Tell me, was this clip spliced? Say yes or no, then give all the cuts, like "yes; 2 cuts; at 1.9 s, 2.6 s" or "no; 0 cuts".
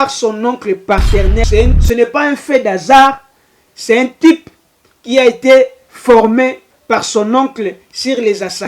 yes; 1 cut; at 1.4 s